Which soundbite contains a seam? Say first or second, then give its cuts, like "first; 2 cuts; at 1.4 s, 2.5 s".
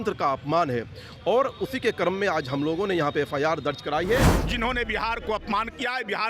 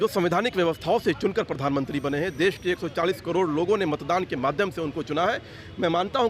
first; 1 cut; at 4.4 s